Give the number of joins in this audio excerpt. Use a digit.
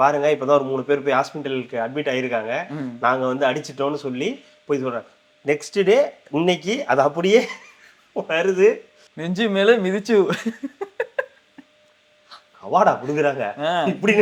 0